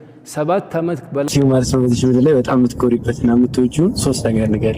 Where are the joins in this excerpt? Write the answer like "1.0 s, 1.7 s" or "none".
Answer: 1.3 s